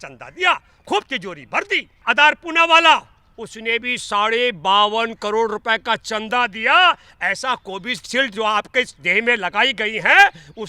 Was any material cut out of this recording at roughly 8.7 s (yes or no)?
no